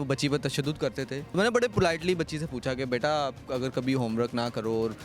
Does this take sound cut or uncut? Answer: cut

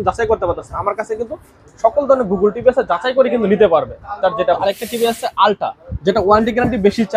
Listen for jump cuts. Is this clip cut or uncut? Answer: cut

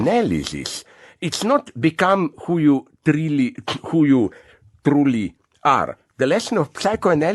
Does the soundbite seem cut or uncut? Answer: uncut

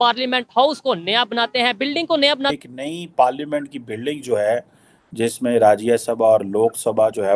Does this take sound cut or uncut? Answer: cut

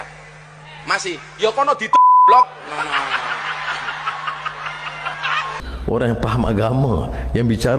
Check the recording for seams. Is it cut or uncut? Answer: cut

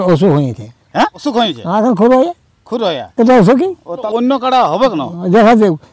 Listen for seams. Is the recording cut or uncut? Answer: cut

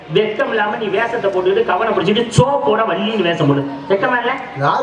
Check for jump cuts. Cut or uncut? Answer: uncut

